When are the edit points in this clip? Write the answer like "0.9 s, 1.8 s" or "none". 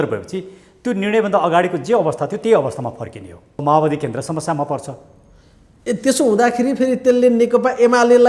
3.6 s